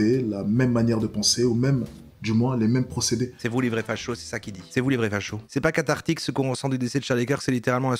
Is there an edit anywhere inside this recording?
yes; 1 cut; at 5.4 s

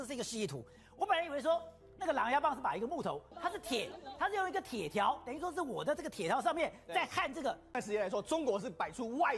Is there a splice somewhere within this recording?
yes; 2 cuts; at 3.3 s, 7.8 s

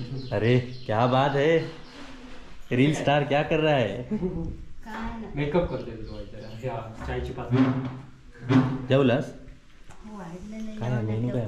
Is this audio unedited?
yes; 0 cuts

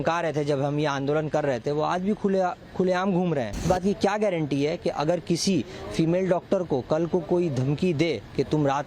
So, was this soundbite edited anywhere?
yes; 1 cut; at 3.6 s

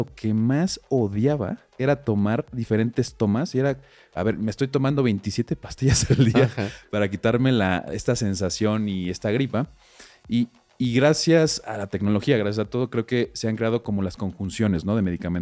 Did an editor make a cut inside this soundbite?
no; 0 cuts

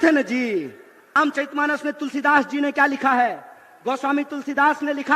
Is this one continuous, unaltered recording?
no; 1 cut; at 1.1 s

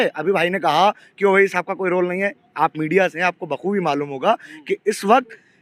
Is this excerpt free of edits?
yes; 0 cuts

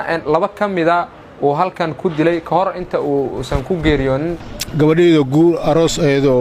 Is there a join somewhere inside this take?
yes; 1 cut; at 4.5 s

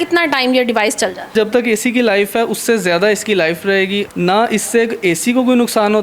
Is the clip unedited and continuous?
no; 2 cuts; at 1.3 s, 4.1 s

